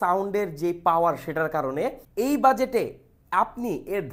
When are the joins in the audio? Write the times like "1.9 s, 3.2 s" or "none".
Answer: 2.0 s